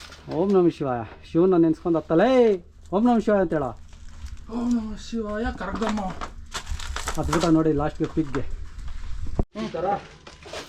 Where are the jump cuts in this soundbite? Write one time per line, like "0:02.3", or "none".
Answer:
none